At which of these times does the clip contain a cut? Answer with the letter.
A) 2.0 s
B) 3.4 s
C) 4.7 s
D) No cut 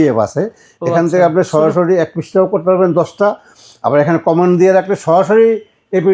D